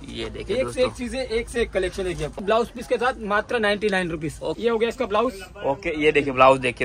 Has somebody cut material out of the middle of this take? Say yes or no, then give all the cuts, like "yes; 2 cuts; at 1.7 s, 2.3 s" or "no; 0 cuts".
yes; 2 cuts; at 2.4 s, 4.5 s